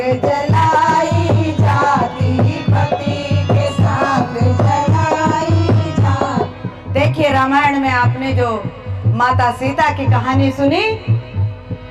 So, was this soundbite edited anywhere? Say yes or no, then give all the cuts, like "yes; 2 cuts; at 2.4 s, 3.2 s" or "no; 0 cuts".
yes; 1 cut; at 6.6 s